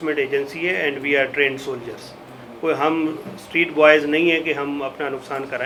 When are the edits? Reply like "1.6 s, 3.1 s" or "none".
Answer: none